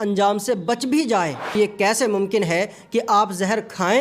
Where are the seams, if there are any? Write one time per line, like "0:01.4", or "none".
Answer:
0:01.6